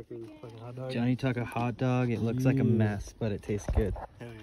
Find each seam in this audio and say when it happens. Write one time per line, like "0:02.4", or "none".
none

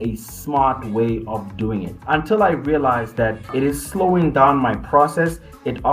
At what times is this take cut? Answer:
0:01.9
0:03.4

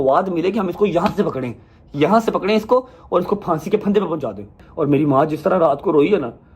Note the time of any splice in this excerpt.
0:04.6

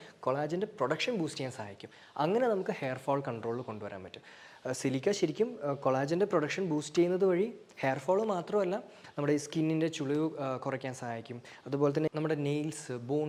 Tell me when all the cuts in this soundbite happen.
none

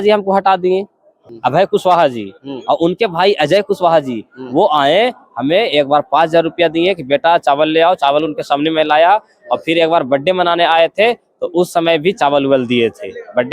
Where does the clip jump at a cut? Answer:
0:01.2

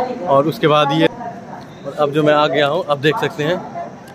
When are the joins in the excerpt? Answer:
0:01.1

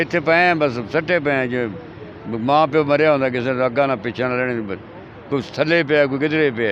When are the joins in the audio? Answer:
none

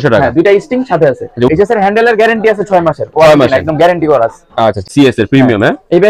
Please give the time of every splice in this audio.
0:01.5
0:04.8

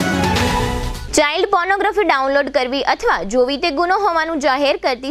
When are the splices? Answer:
none

